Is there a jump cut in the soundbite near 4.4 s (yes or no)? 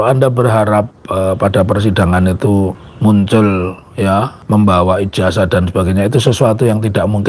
yes